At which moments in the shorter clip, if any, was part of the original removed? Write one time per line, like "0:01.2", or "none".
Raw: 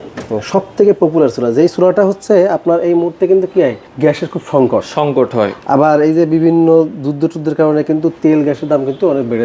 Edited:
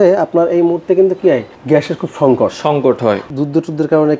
0:03.3